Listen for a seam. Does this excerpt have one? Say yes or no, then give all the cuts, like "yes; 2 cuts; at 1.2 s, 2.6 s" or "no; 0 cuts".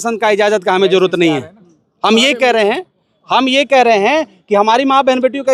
no; 0 cuts